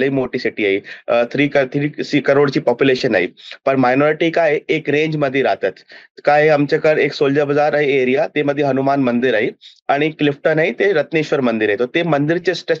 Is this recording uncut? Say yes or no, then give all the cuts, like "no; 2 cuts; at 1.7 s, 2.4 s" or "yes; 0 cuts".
yes; 0 cuts